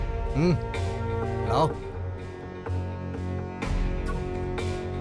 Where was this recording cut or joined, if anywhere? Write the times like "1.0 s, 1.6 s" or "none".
none